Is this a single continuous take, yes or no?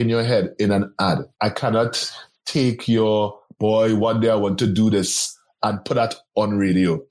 no